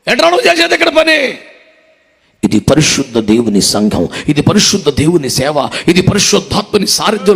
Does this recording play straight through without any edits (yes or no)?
yes